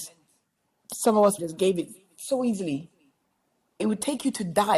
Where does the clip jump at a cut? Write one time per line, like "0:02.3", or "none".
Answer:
0:01.4
0:03.8